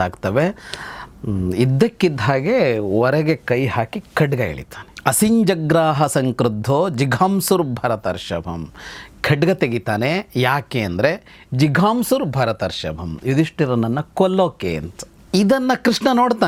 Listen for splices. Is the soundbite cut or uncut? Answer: uncut